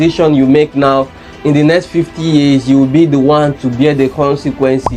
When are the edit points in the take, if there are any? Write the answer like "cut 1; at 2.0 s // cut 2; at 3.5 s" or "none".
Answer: none